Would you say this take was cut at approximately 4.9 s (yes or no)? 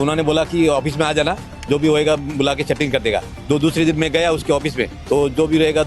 yes